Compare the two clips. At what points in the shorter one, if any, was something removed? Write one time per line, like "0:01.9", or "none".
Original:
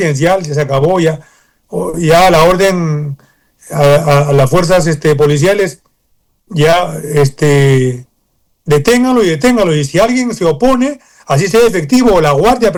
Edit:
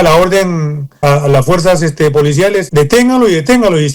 0:01.0
0:02.7